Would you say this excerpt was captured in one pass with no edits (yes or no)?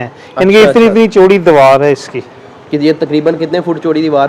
yes